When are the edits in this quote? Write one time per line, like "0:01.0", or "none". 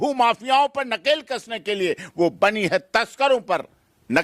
none